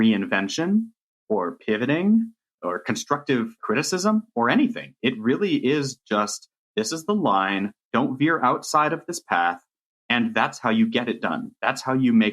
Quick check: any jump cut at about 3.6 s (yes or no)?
yes